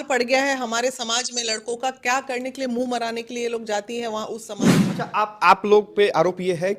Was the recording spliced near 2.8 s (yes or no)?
no